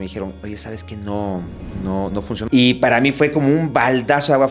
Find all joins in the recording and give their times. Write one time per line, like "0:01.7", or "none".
0:02.4